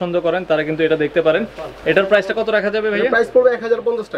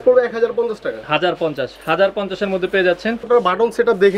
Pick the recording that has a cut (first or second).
second